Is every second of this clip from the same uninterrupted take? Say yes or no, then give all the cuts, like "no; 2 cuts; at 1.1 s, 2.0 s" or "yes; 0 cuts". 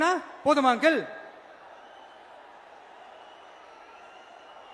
yes; 0 cuts